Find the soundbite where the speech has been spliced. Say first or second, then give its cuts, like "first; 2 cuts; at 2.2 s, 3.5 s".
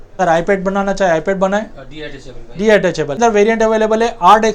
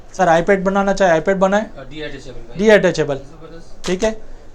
first; 1 cut; at 3.2 s